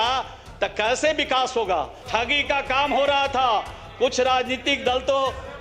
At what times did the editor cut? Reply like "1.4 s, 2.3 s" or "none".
2.0 s